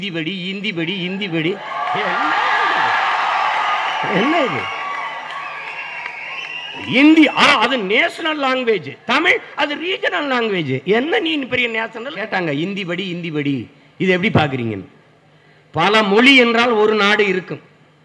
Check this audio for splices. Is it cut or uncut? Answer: cut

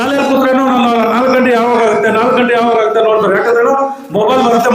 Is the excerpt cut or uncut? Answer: uncut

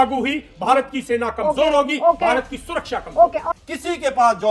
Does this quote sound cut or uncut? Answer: cut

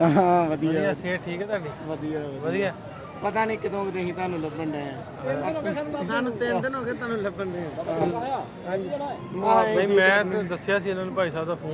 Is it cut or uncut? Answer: uncut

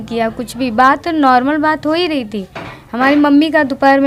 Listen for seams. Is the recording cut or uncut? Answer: uncut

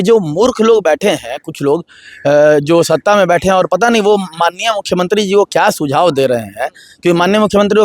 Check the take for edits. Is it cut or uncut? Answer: uncut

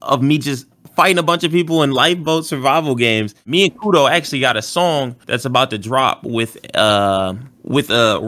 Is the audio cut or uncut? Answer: cut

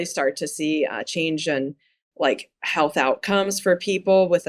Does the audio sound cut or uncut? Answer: uncut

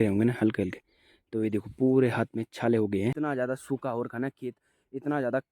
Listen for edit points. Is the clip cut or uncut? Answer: cut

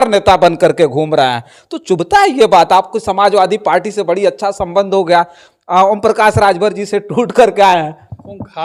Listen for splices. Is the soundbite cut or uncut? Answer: uncut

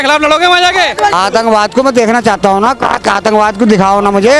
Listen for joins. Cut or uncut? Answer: cut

